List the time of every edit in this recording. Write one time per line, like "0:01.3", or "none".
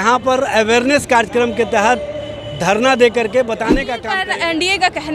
0:03.9